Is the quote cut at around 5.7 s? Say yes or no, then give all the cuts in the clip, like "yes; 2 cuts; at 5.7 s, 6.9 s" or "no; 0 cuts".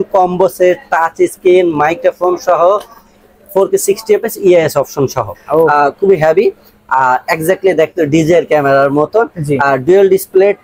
yes; 1 cut; at 5.7 s